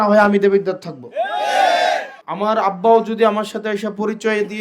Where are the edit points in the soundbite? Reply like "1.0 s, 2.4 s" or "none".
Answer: 2.2 s

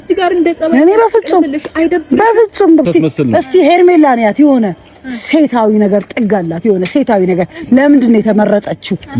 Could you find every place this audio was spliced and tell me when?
2.9 s

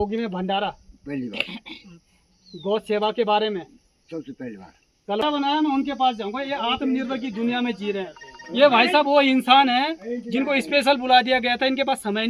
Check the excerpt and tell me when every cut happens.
5.2 s

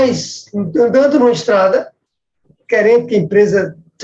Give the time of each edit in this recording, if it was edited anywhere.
none

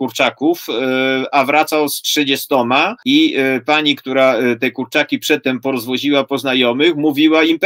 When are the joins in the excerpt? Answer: 3.0 s

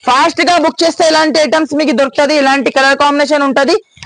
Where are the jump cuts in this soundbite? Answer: none

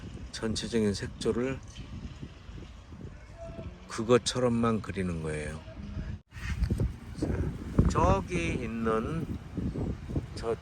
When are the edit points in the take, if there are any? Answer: 6.2 s

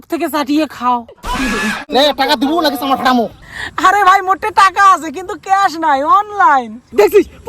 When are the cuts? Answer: 1.8 s

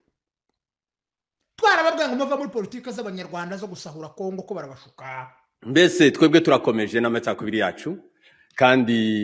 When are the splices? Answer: 5.7 s

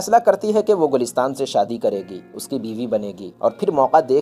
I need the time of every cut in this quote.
none

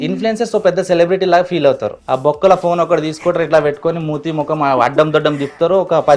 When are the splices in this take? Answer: 1.9 s

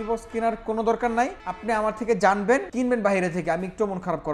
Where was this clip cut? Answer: 1.5 s, 2.7 s

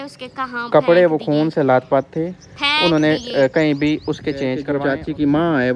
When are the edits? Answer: 4.7 s

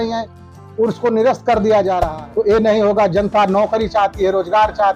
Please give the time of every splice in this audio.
2.1 s

